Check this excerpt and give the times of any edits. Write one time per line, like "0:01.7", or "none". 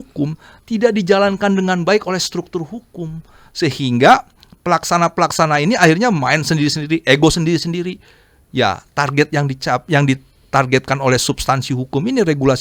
none